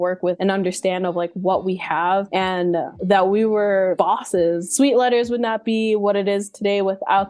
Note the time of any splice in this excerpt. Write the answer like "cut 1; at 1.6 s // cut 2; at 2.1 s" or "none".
cut 1; at 4.7 s